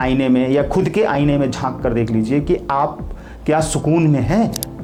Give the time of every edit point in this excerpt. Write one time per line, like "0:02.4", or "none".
none